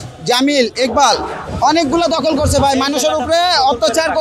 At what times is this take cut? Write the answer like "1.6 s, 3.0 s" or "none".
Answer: 1.4 s